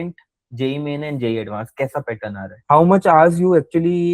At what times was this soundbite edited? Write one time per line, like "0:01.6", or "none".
0:02.6